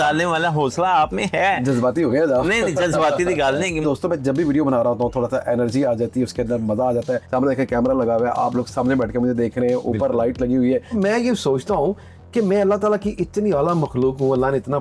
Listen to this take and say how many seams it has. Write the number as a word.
three